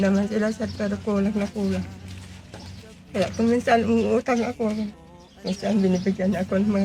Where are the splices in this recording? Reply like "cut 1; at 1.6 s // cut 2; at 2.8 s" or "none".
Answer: none